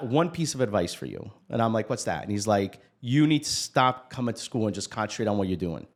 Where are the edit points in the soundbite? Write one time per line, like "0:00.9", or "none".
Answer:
none